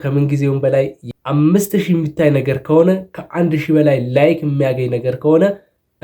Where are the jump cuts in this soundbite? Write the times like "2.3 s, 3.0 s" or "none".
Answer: 1.0 s